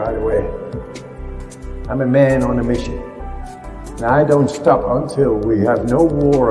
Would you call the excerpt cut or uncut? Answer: uncut